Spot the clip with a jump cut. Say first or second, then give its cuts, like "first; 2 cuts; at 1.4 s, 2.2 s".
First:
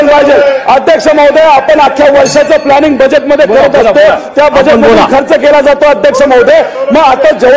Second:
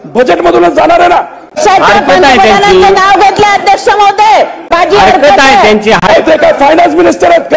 second; 3 cuts; at 1.6 s, 4.7 s, 6.0 s